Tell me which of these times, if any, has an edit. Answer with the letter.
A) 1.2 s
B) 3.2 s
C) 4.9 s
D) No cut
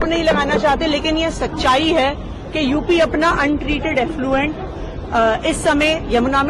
D